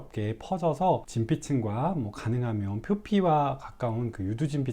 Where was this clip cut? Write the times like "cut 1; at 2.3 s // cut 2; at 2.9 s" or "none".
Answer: cut 1; at 1.1 s